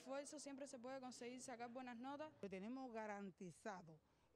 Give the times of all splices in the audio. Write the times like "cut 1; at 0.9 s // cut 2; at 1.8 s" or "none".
cut 1; at 2.4 s

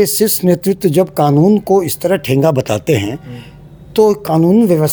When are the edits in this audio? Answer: none

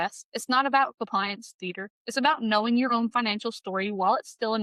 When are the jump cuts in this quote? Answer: none

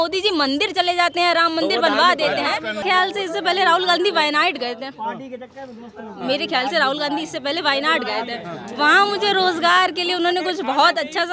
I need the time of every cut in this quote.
cut 1; at 2.8 s

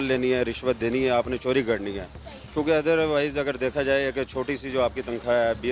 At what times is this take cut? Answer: none

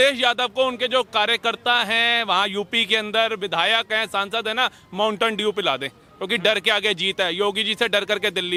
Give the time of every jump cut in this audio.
none

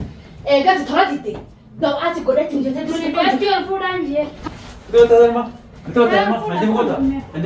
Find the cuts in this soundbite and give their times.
cut 1; at 4.4 s

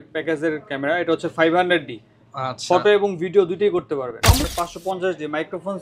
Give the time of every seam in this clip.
cut 1; at 4.5 s

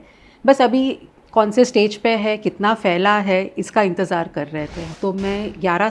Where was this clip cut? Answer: cut 1; at 4.8 s

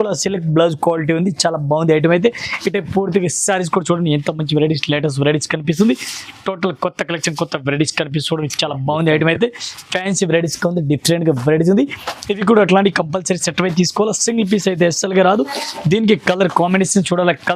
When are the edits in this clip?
none

